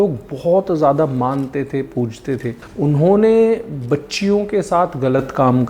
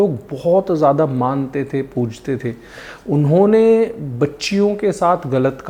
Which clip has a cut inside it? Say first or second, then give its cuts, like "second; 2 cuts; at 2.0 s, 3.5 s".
first; 1 cut; at 2.6 s